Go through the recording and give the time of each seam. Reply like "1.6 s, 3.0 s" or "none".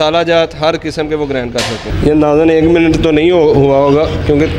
1.9 s